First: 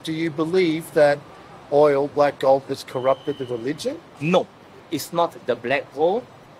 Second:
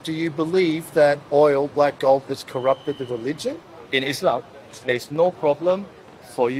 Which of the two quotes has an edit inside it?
second; 2 cuts; at 1.2 s, 3.7 s

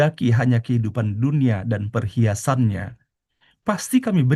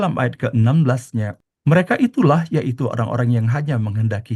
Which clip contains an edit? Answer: second; 1 cut; at 1.3 s

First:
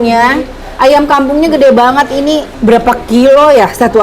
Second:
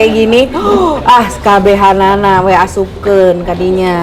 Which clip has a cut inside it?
first; 1 cut; at 2.5 s

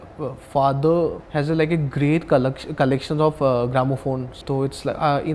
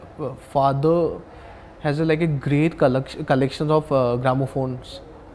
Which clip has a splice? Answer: first; 2 cuts; at 1.2 s, 4.3 s

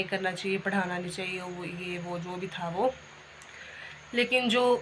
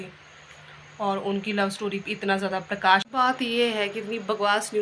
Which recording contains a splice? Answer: second; 1 cut; at 3.1 s

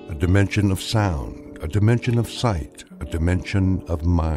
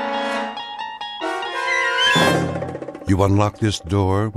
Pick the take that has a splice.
second; 1 cut; at 2.9 s

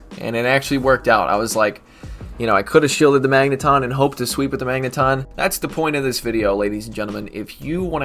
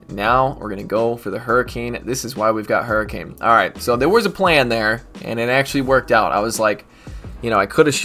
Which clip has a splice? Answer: first; 1 cut; at 5.3 s

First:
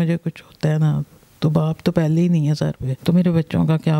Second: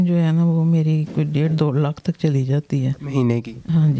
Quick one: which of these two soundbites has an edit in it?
first; 1 cut; at 2.9 s

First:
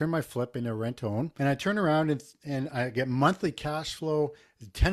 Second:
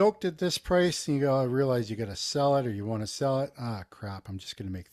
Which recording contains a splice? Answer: first; 1 cut; at 1.3 s

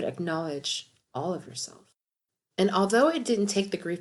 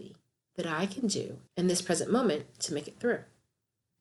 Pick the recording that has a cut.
first; 1 cut; at 2.0 s

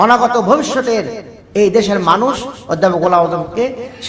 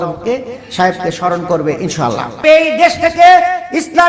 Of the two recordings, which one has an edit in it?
second; 1 cut; at 2.4 s

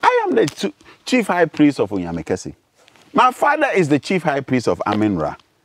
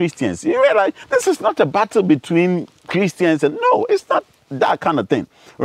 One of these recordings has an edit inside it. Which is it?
second; 1 cut; at 1.0 s

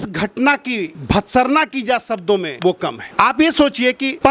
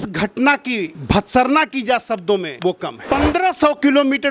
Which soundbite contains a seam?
second; 1 cut; at 3.0 s

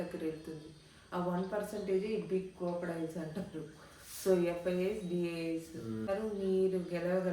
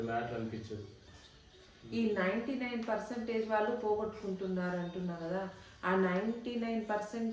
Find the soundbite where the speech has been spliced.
first; 1 cut; at 6.0 s

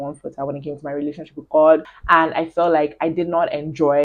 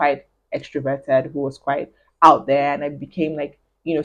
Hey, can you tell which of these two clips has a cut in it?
first; 1 cut; at 1.9 s

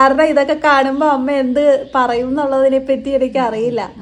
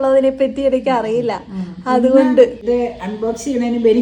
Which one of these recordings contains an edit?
second; 1 cut; at 2.6 s

